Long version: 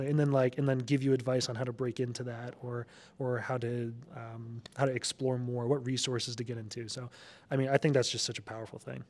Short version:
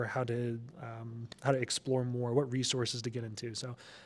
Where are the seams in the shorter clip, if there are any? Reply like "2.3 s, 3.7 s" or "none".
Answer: none